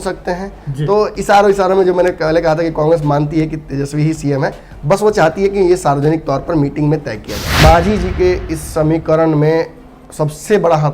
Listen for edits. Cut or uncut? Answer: cut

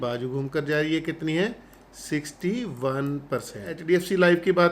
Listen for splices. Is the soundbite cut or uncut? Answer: cut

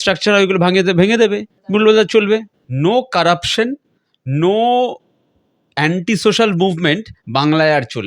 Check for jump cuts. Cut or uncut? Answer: cut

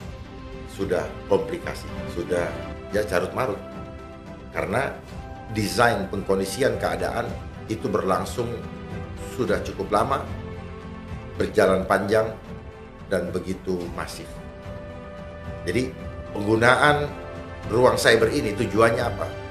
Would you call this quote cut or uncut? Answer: cut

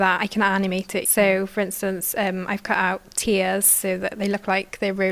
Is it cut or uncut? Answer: uncut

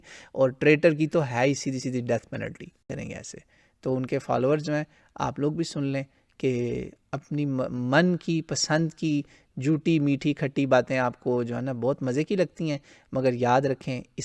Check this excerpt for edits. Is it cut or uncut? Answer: cut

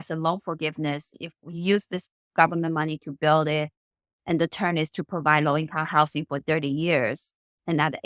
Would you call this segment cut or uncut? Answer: cut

